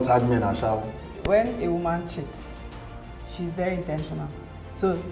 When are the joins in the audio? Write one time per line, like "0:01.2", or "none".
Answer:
0:01.1